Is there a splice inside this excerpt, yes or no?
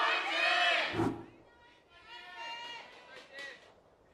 no